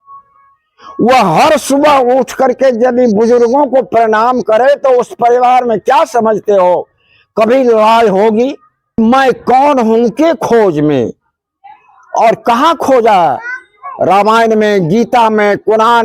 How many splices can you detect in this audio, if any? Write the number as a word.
one